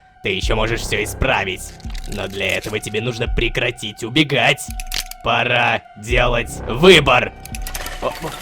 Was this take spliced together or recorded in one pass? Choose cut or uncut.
uncut